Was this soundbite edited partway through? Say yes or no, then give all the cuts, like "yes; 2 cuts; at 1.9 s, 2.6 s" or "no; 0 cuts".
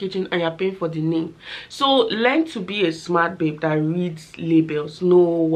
no; 0 cuts